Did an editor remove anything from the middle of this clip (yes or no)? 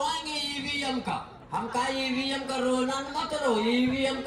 no